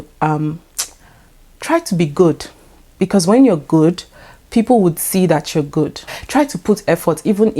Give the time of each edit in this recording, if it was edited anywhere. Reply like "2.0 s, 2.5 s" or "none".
6.1 s